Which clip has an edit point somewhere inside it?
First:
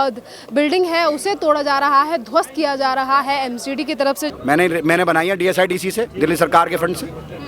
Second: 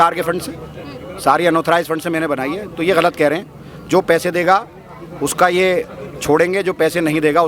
first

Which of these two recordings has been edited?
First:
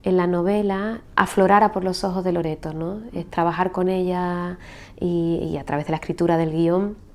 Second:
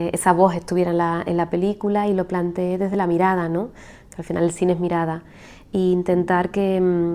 first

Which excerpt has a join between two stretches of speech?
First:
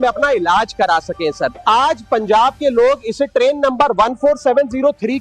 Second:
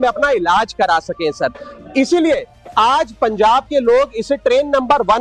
first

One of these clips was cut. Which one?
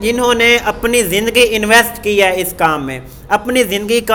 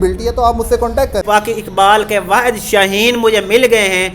second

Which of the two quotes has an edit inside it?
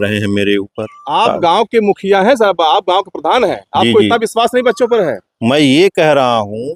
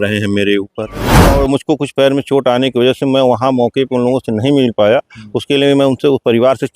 second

